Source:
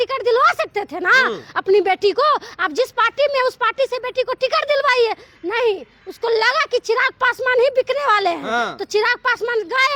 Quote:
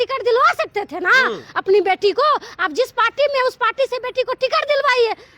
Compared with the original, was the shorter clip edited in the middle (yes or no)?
no